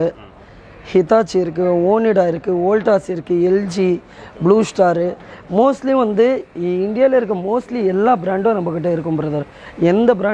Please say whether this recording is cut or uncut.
uncut